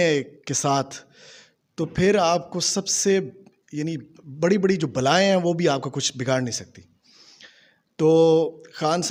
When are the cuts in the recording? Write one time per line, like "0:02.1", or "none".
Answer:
none